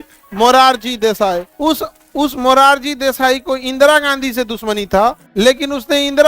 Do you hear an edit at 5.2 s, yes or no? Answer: yes